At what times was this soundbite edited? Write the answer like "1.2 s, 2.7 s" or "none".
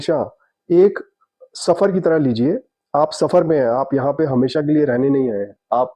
none